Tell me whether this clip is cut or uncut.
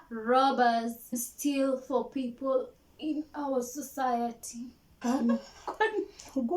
cut